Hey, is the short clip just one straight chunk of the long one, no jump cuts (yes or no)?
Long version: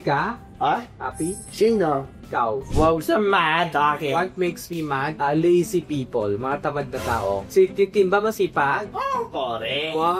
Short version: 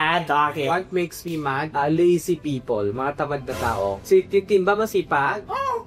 yes